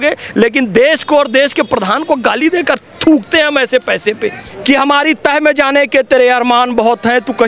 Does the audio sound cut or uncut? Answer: cut